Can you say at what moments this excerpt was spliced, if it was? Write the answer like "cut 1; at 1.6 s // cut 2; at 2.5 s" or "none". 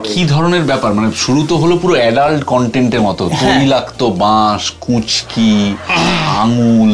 none